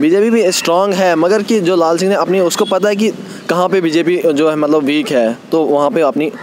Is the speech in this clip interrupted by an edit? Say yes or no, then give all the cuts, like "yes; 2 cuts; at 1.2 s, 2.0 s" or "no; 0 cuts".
no; 0 cuts